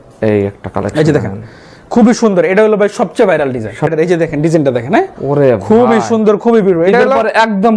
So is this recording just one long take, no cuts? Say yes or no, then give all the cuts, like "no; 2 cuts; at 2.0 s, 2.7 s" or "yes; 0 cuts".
no; 1 cut; at 3.9 s